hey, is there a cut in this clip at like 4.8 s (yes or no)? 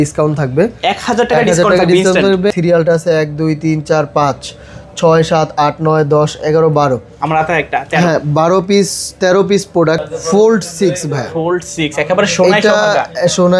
no